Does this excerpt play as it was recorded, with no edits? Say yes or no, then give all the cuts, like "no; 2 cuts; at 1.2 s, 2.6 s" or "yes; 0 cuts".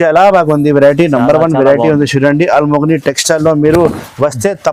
yes; 0 cuts